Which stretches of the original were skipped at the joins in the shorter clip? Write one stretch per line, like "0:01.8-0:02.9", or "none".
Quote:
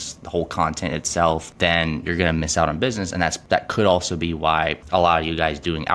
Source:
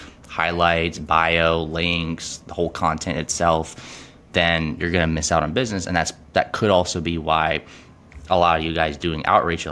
0:03.7-0:04.2
0:06.1-0:06.2
0:07.6-0:08.2

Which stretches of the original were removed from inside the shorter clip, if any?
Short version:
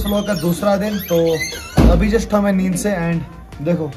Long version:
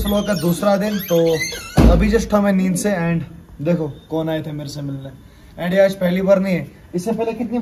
none

